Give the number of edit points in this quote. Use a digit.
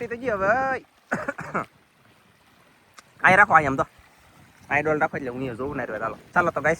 0